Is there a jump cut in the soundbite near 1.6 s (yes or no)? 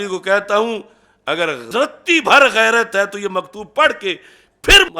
yes